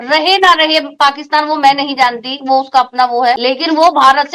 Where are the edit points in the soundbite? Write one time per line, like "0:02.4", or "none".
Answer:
0:03.4